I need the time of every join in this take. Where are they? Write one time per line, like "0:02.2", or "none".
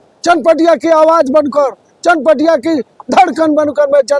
none